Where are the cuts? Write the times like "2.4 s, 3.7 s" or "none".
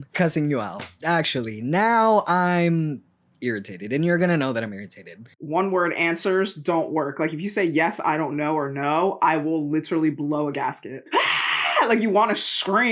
5.2 s, 11.0 s